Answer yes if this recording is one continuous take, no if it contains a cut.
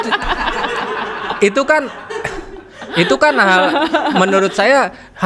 yes